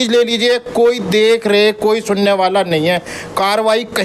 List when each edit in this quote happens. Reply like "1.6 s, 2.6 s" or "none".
none